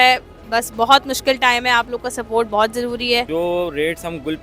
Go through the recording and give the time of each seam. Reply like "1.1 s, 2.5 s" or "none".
3.3 s